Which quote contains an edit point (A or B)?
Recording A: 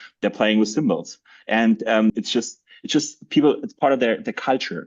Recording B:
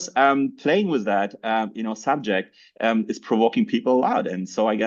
A